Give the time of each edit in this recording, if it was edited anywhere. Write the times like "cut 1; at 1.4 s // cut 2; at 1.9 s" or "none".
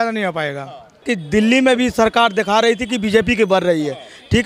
cut 1; at 1.0 s